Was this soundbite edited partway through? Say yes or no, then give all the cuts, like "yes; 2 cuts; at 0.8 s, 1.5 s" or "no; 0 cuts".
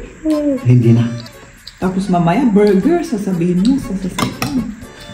no; 0 cuts